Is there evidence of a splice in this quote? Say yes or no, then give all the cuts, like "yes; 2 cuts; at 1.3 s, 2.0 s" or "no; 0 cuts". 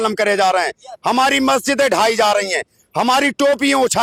no; 0 cuts